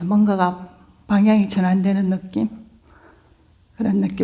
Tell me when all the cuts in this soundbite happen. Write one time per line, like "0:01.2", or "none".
none